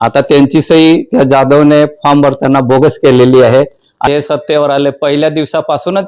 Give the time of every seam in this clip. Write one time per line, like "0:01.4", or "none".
0:04.1